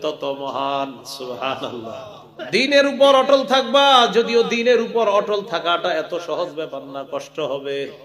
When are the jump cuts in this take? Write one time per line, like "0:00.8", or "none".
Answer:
0:02.3